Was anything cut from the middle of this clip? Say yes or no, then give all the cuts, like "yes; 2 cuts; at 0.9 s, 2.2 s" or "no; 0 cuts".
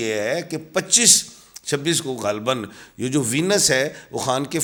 no; 0 cuts